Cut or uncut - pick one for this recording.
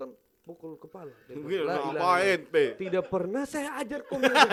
uncut